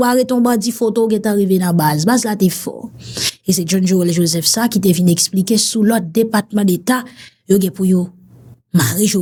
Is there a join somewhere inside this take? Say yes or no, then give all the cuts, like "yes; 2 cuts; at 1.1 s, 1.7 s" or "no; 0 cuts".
no; 0 cuts